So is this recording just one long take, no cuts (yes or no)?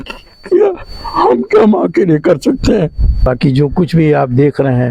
no